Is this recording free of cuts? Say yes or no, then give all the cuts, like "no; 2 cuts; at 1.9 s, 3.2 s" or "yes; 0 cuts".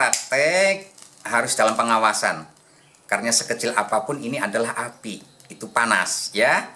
yes; 0 cuts